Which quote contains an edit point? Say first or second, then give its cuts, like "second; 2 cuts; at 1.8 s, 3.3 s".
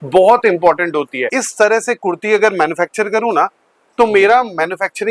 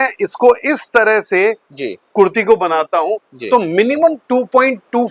first; 1 cut; at 1.4 s